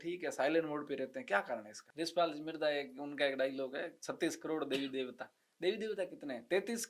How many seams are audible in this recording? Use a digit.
1